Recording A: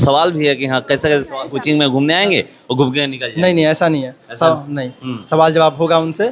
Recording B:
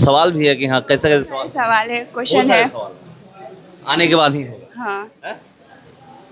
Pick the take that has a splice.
A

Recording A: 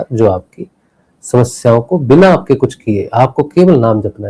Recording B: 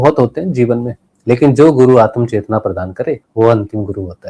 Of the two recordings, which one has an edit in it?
B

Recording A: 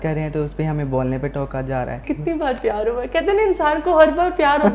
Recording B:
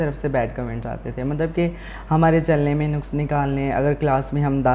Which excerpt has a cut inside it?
A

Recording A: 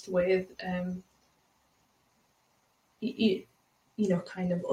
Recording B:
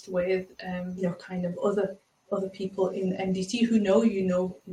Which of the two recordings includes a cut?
B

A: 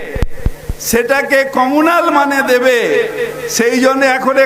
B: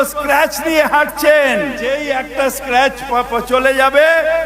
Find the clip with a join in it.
B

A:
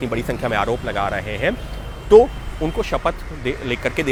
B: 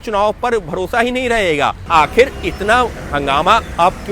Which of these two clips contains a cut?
B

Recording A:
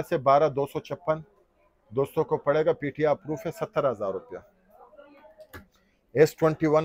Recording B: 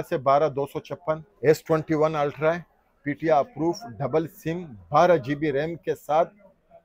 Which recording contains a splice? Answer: B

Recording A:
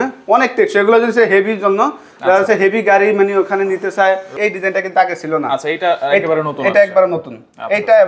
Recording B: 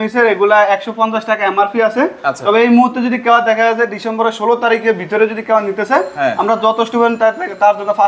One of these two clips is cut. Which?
A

